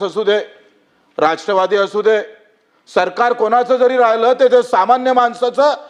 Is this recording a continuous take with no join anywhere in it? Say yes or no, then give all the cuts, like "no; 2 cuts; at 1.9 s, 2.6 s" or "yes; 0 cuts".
yes; 0 cuts